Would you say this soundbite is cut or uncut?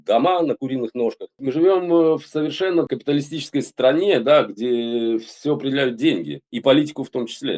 cut